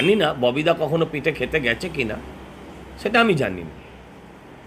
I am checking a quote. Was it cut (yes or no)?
no